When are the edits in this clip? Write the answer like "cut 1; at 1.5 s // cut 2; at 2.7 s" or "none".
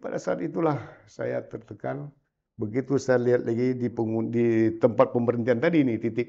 none